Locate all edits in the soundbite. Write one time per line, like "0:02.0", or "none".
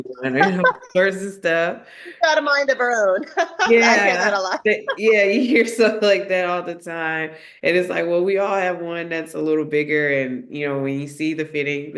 none